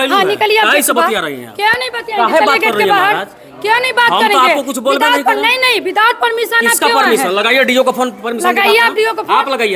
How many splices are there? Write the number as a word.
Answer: zero